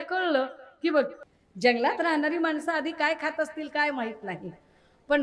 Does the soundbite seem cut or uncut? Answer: cut